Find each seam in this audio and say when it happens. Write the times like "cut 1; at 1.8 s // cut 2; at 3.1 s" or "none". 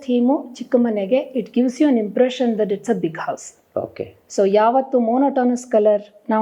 none